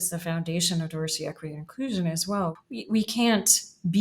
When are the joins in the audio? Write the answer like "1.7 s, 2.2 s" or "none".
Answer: 2.5 s